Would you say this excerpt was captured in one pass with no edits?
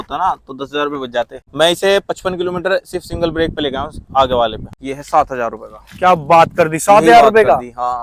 no; 2 cuts; at 1.4 s, 4.7 s

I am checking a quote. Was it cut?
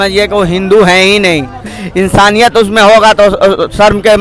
yes; 1 cut; at 1.7 s

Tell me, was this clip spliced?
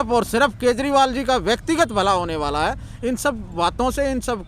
no; 0 cuts

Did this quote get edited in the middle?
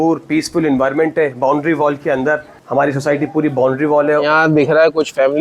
yes; 2 cuts; at 2.5 s, 4.2 s

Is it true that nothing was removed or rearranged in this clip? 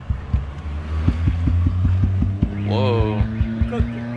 yes; 0 cuts

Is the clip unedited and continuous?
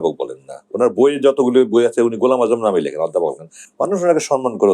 yes; 0 cuts

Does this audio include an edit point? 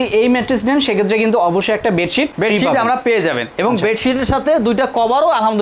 no; 0 cuts

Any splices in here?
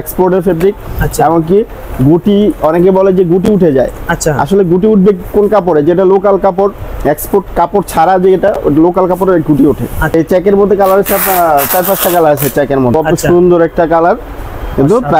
yes; 2 cuts; at 10.1 s, 12.9 s

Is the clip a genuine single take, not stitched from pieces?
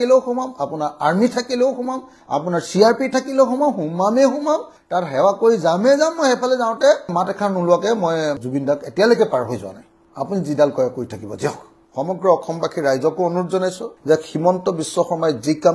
yes; 0 cuts

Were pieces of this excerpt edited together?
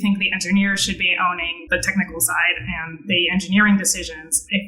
yes; 1 cut; at 1.5 s

